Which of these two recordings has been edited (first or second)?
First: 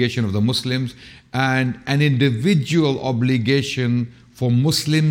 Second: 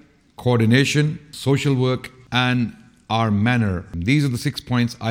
second